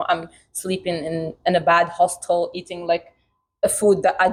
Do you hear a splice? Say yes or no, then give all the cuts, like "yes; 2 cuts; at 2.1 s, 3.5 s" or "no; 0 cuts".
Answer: no; 0 cuts